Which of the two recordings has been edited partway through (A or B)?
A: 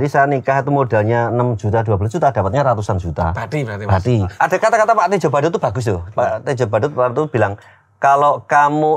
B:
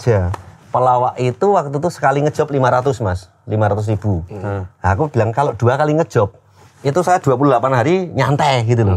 A